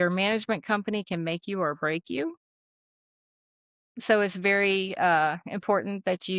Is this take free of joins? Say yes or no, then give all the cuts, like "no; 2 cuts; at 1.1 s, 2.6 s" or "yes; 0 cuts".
yes; 0 cuts